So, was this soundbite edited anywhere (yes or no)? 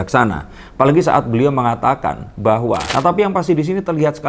yes